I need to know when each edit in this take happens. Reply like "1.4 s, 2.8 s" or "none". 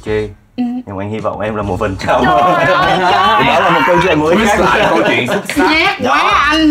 none